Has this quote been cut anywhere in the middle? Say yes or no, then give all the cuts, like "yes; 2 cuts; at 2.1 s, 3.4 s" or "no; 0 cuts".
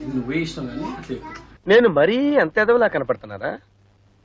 yes; 1 cut; at 1.4 s